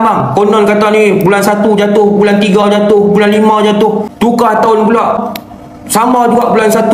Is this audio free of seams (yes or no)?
no